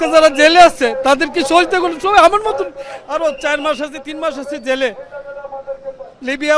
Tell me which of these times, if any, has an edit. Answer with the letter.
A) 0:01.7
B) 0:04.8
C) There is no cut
C